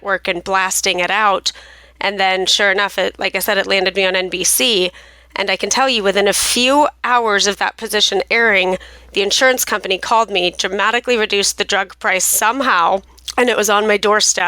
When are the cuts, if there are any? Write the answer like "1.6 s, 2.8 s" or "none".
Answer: 13.2 s

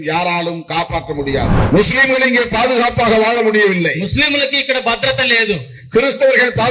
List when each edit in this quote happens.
1.6 s

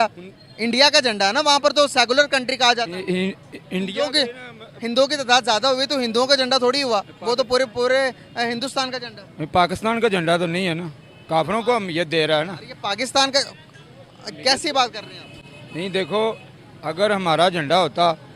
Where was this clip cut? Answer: none

